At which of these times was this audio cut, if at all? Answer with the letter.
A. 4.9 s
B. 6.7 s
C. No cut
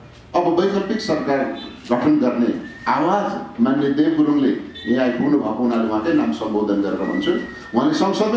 C